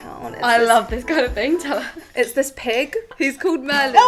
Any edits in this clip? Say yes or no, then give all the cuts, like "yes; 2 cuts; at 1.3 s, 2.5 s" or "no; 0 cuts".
yes; 1 cut; at 3.1 s